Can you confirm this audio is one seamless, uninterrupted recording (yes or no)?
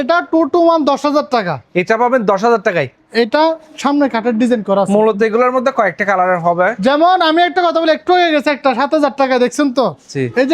yes